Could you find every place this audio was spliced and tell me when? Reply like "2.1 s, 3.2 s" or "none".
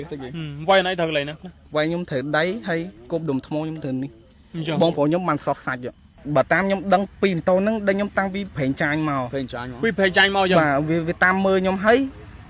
6.1 s